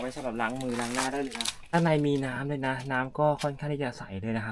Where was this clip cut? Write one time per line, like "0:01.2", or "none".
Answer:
0:01.7